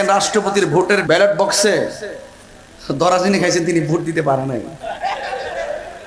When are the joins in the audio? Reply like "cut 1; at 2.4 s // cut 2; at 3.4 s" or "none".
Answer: cut 1; at 1.0 s